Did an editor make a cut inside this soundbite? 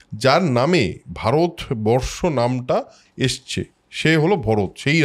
no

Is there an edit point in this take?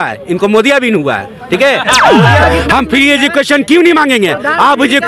yes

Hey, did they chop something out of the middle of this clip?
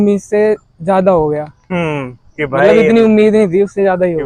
no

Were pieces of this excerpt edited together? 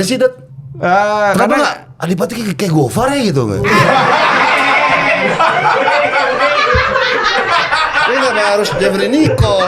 no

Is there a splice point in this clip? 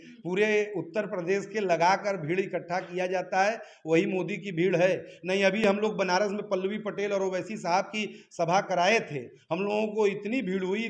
no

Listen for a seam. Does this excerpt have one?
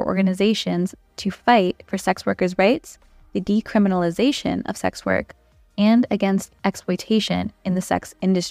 no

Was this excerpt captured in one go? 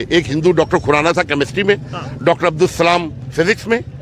yes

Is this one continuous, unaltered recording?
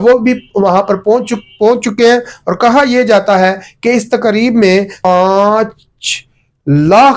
yes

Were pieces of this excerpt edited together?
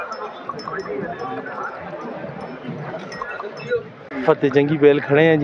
yes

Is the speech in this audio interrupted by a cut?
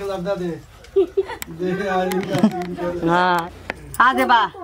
no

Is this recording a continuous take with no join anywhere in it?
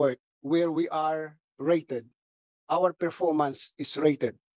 yes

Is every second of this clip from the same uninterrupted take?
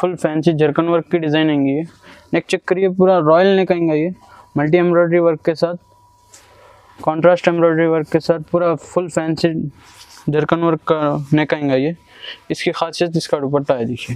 yes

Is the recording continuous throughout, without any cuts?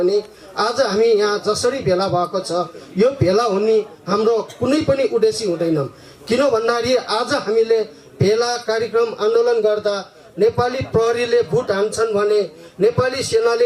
yes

